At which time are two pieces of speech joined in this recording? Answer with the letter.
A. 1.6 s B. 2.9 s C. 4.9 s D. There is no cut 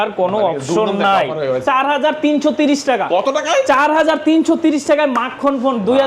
A